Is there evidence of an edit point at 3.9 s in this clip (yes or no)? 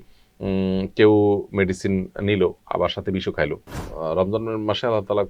yes